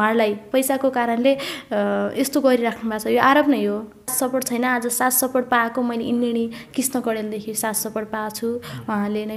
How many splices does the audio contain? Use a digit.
1